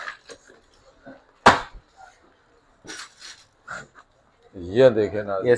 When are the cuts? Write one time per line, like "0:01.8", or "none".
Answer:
0:02.8